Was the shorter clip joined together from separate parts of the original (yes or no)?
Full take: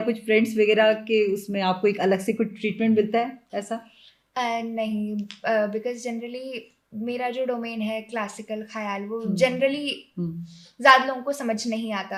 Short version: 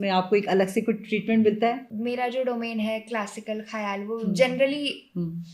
yes